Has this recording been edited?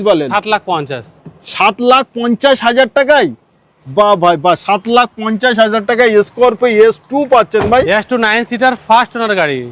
no; 0 cuts

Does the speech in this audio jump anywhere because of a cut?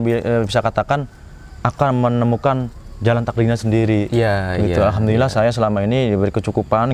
no; 0 cuts

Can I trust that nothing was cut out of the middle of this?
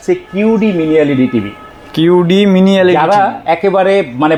yes; 0 cuts

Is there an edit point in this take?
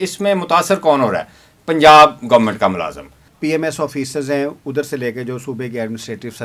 yes; 1 cut; at 3.3 s

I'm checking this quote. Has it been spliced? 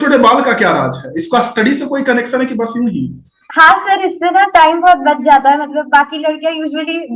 no; 0 cuts

